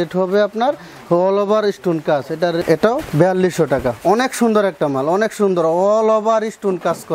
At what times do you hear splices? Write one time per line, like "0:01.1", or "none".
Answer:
0:02.6